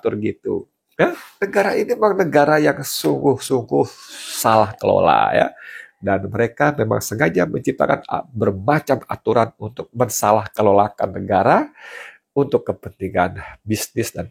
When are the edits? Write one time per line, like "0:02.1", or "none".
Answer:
0:01.3